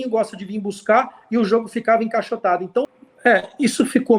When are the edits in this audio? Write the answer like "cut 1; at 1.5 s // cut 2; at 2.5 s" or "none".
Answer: cut 1; at 2.9 s